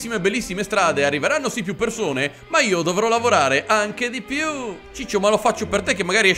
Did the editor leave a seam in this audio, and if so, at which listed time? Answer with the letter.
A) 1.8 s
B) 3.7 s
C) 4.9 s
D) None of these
C